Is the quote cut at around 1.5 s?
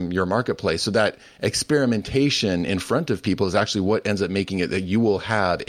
no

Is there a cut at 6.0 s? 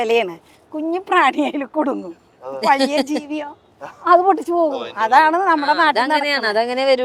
no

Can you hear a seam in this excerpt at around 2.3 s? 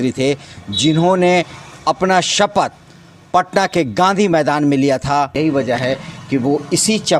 no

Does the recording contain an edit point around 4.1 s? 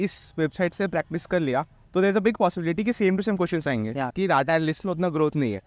yes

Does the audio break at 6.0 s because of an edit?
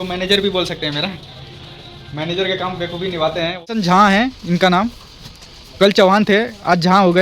no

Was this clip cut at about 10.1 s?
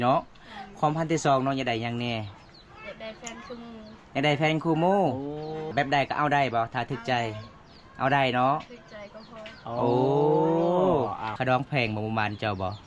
no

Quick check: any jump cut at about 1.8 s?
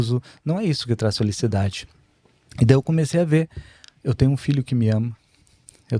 no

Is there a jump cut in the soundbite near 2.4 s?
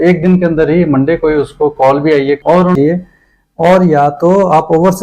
yes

